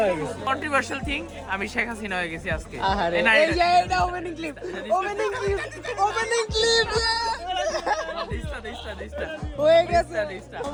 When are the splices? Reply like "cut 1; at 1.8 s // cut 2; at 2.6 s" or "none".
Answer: none